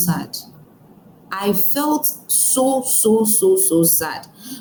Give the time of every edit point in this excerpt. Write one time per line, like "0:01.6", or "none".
none